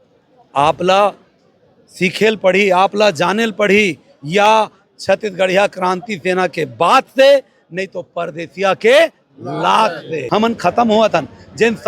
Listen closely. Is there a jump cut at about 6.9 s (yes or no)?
no